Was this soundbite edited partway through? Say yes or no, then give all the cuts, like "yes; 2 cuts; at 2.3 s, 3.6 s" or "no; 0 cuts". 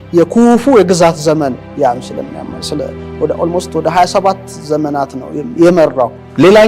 no; 0 cuts